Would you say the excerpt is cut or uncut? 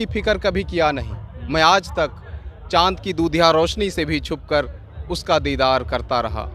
uncut